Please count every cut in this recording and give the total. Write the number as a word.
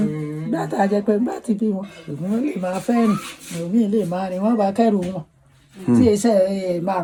zero